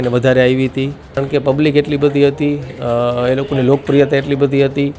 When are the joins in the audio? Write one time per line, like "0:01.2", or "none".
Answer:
0:01.2